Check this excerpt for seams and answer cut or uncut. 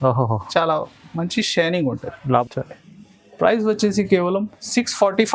cut